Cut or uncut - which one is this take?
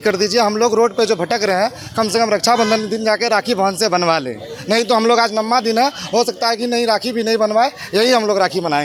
uncut